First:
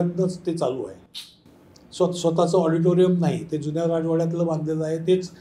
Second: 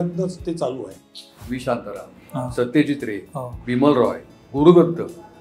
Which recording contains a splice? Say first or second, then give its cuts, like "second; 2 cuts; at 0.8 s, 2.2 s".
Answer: second; 1 cut; at 1.4 s